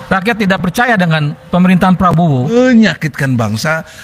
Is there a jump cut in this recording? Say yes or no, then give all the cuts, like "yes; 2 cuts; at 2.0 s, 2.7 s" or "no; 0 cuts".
yes; 1 cut; at 2.5 s